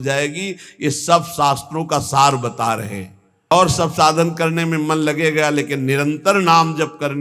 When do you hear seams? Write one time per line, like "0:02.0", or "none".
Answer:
0:03.5